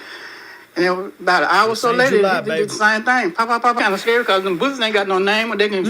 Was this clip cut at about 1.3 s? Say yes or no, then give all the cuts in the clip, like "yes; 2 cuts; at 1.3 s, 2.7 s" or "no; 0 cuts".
no; 1 cut; at 3.8 s